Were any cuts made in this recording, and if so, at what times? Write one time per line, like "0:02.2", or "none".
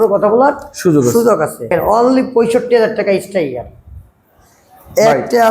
0:01.7

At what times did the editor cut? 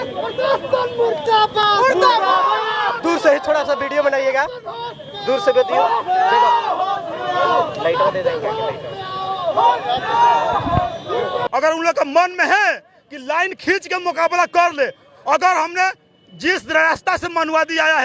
0:01.6
0:11.5

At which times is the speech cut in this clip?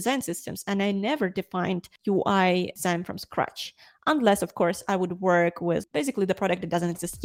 none

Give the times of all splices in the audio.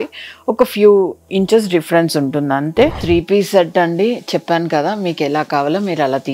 0:03.0

